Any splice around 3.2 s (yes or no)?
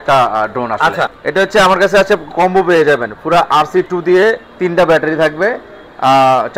no